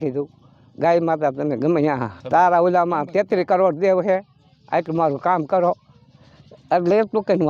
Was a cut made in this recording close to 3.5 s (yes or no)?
no